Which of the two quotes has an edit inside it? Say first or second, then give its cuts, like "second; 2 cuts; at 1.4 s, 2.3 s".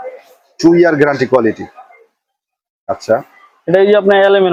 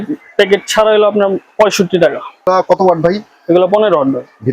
second; 1 cut; at 2.5 s